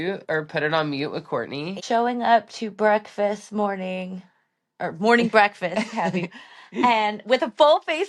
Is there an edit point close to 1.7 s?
yes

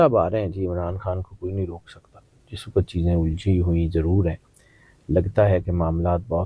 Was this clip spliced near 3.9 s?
no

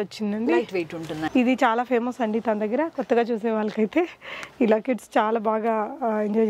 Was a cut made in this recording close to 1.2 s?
yes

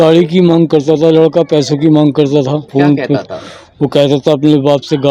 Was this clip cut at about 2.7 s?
yes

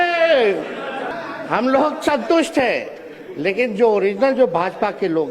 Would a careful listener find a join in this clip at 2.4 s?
no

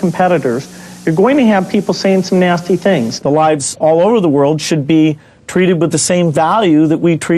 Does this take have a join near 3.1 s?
yes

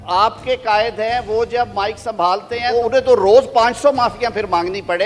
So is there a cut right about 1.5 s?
no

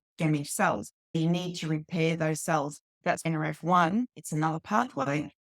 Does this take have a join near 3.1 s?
yes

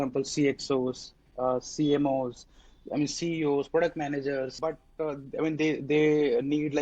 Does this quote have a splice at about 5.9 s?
no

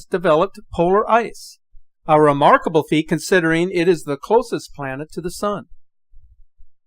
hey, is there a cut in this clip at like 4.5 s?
yes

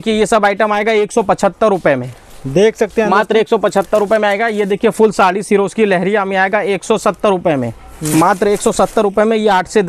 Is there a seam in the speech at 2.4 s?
no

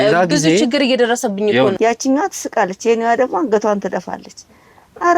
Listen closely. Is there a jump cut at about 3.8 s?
no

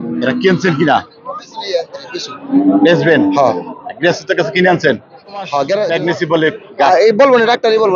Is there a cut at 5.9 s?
yes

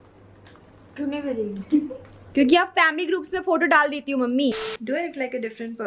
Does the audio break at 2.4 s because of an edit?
no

